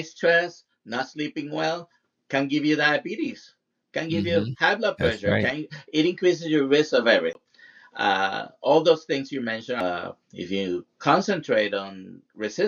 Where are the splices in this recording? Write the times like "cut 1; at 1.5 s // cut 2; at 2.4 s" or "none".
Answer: cut 1; at 7.5 s // cut 2; at 9.8 s

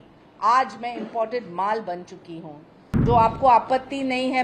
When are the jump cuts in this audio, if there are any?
cut 1; at 2.9 s

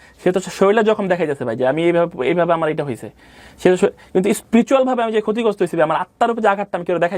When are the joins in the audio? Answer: none

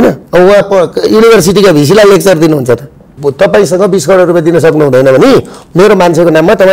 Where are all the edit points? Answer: cut 1; at 3.2 s

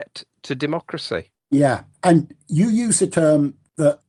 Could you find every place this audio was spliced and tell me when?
none

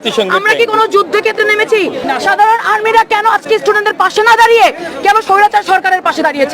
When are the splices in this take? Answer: cut 1; at 2.0 s

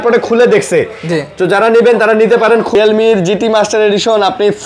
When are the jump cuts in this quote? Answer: cut 1; at 2.8 s

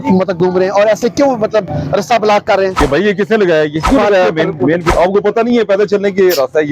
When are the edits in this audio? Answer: cut 1; at 2.8 s // cut 2; at 3.9 s // cut 3; at 4.9 s

